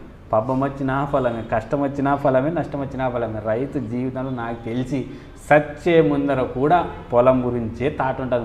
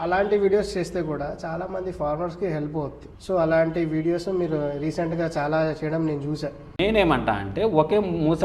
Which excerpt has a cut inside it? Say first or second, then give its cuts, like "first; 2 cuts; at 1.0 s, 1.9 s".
second; 2 cuts; at 3.1 s, 6.8 s